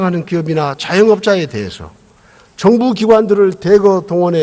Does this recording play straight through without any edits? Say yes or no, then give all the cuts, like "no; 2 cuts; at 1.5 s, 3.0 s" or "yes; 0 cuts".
no; 1 cut; at 2.4 s